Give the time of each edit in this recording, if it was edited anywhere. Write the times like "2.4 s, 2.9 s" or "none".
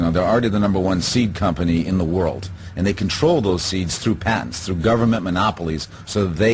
none